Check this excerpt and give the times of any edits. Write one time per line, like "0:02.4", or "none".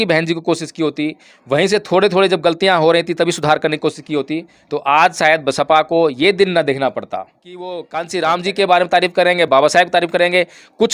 0:07.7